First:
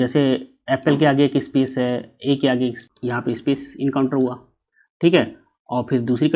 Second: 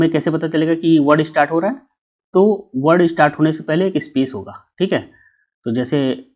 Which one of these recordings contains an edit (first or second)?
first